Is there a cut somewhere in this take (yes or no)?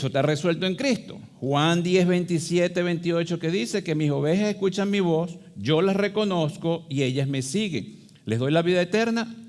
no